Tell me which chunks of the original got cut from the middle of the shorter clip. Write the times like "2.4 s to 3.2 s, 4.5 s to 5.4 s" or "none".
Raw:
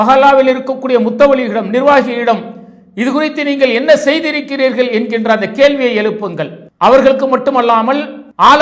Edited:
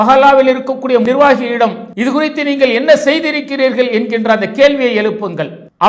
1.0 s to 1.7 s, 2.5 s to 2.9 s